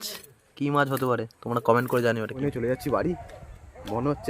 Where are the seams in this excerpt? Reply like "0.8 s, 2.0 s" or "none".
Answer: 2.4 s